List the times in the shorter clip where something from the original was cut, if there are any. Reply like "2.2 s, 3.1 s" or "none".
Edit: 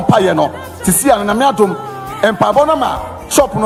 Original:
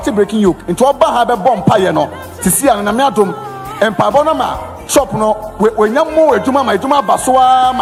none